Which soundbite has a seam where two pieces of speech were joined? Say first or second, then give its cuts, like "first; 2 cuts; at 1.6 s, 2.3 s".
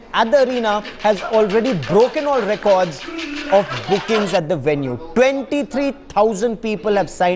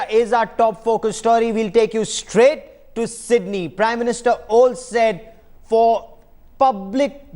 first; 1 cut; at 6.4 s